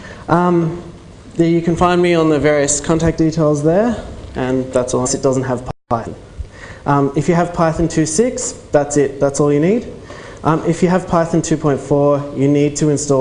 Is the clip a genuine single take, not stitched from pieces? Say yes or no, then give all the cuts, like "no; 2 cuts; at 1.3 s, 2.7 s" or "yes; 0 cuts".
yes; 0 cuts